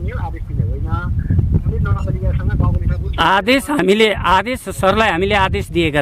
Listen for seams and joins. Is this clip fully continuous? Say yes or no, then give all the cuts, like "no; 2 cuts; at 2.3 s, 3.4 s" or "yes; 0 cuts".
yes; 0 cuts